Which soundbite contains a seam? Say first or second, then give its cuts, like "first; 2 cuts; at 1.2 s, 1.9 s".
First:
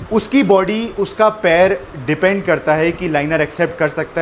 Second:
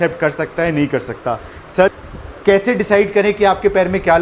second; 1 cut; at 1.9 s